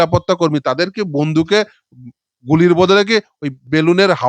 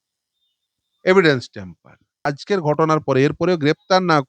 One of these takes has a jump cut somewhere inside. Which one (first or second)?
second